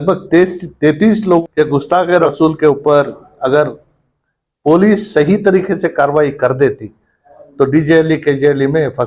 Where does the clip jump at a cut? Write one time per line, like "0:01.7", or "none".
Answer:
0:01.4